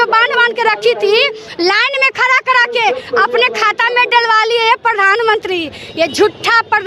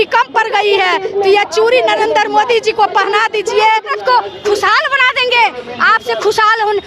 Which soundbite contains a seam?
second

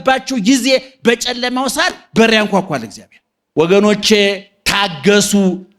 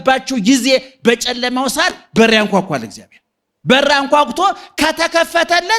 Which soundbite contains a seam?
first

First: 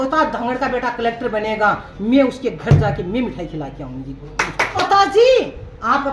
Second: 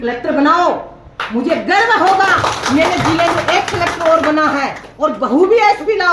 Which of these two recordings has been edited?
first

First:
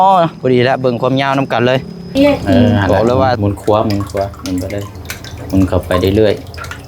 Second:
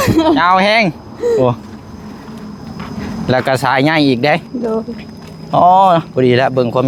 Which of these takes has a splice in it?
first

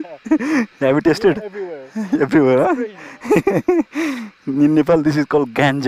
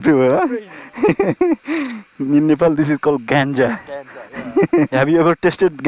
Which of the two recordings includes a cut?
second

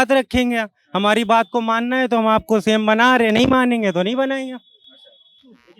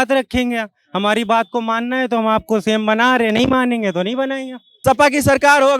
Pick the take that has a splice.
second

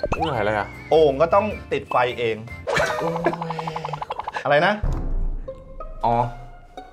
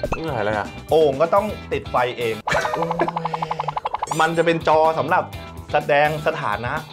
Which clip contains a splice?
second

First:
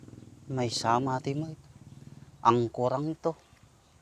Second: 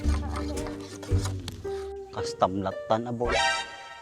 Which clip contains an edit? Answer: second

